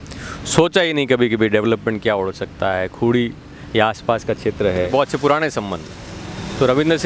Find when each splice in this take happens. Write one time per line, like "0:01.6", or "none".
0:04.9